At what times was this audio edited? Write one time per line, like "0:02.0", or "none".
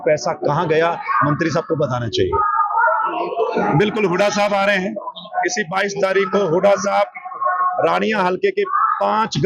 0:03.1